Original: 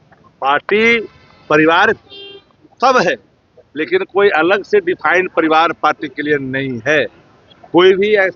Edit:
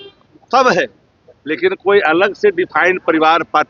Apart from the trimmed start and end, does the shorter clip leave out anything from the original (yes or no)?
no